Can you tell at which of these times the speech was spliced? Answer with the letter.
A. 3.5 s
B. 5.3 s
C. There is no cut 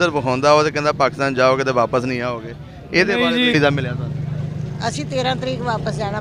A